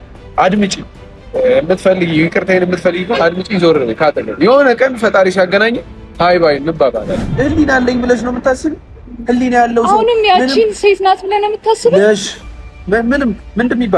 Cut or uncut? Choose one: cut